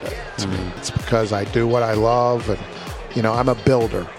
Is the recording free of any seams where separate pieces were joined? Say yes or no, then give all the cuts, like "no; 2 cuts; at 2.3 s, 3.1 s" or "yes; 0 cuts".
no; 1 cut; at 0.9 s